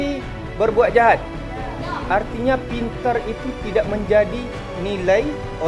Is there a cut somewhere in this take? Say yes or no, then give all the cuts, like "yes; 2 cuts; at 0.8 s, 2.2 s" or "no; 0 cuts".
yes; 1 cut; at 4.7 s